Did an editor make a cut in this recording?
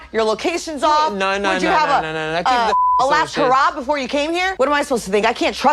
yes; 1 cut; at 4.5 s

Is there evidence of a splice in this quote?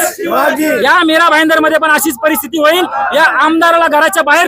no; 0 cuts

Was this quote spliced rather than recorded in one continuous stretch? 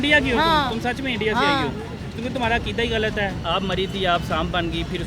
yes; 1 cut; at 3.4 s

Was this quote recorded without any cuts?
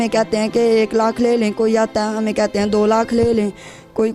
yes; 0 cuts

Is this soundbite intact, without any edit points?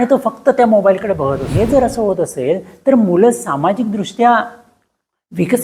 no; 1 cut; at 1.5 s

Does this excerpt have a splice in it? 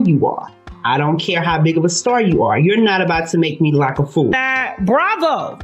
yes; 1 cut; at 4.3 s

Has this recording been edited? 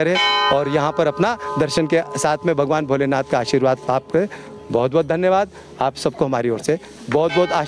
no; 0 cuts

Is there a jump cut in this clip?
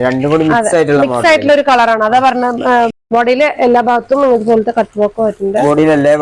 yes; 1 cut; at 2.9 s

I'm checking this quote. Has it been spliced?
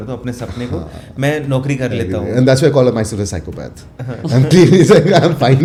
no; 0 cuts

